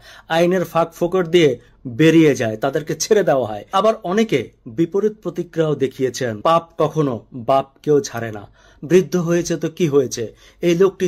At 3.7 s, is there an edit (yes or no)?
yes